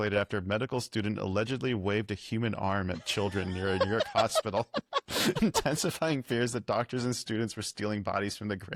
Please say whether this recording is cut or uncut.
uncut